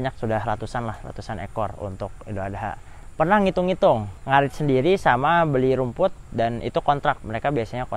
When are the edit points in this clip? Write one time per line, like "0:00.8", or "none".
0:02.9
0:04.1